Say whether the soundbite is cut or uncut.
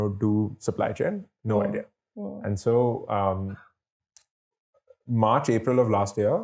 uncut